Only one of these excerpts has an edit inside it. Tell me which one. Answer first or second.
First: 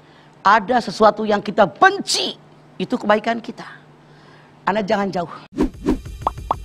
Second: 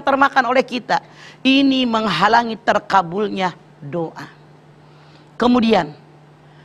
first